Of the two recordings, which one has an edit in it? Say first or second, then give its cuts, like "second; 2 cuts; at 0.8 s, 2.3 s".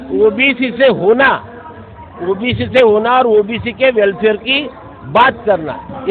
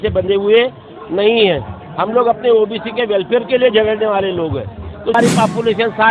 second; 1 cut; at 5.1 s